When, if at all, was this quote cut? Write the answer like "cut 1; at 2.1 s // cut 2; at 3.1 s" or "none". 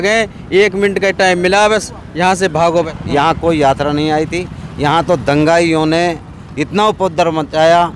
cut 1; at 2.9 s